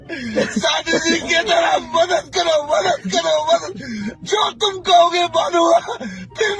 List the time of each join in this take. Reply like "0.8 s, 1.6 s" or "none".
none